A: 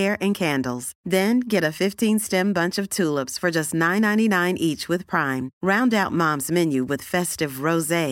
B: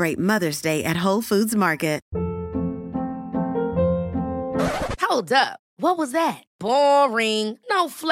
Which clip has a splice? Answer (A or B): B